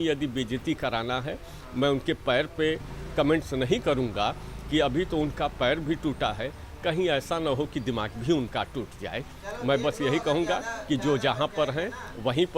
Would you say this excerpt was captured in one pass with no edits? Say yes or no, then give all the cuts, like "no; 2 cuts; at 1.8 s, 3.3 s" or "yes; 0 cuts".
yes; 0 cuts